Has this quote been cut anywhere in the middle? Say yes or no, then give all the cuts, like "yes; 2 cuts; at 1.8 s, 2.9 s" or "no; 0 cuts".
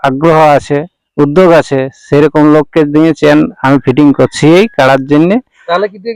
no; 0 cuts